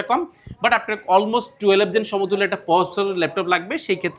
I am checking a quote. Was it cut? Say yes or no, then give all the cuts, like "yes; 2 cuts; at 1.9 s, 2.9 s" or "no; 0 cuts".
no; 0 cuts